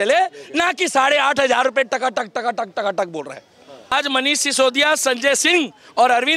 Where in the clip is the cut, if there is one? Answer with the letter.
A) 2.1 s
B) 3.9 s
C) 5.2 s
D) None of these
B